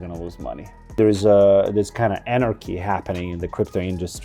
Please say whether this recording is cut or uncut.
cut